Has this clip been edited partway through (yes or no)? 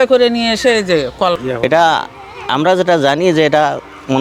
yes